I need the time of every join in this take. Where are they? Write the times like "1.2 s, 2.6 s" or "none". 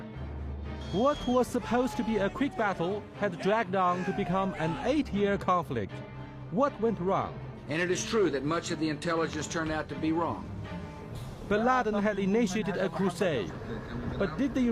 11.2 s